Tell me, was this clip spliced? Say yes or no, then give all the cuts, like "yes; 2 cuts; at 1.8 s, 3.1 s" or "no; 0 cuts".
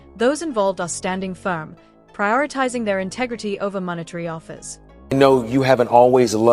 yes; 1 cut; at 5.0 s